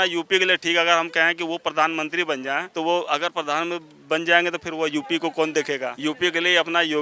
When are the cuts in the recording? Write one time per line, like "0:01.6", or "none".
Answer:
0:02.7
0:05.9